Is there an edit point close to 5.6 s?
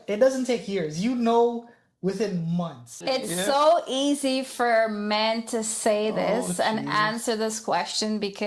no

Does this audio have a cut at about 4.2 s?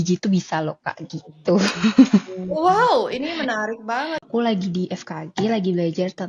yes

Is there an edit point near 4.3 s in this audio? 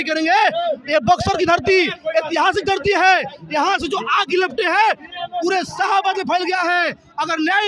no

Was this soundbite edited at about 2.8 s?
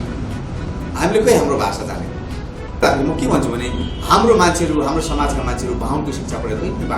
yes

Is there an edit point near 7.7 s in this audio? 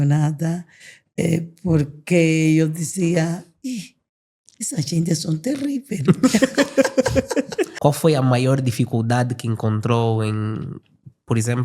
yes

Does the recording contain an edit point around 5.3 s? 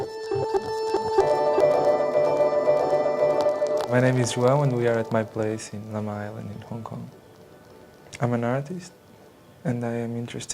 yes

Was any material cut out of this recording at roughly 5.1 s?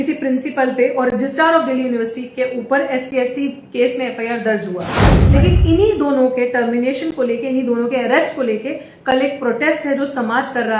yes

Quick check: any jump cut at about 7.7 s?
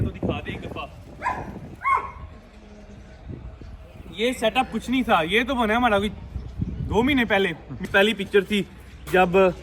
yes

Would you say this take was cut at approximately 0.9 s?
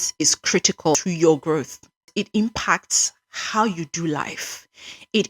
yes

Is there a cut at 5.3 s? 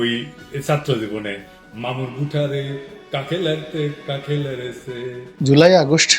yes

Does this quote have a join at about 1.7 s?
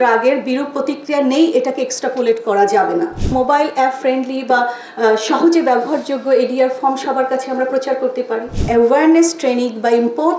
no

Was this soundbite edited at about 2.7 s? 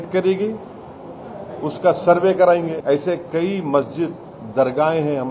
yes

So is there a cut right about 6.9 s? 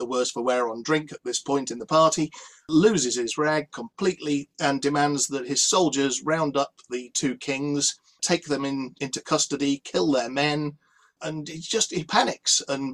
no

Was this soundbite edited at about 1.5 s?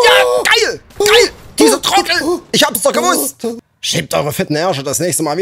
no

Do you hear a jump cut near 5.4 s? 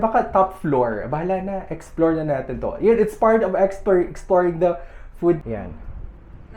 yes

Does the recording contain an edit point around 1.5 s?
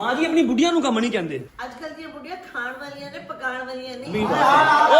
yes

